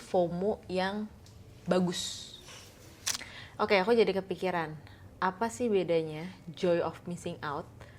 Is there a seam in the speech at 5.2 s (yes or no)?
no